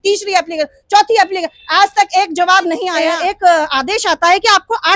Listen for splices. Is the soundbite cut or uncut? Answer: cut